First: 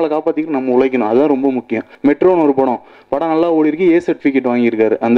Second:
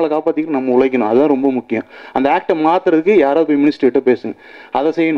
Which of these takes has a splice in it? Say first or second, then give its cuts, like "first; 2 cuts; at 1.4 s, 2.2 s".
first; 1 cut; at 1.8 s